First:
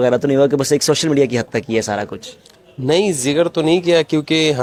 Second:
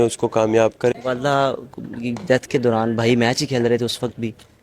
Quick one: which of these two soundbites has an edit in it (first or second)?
second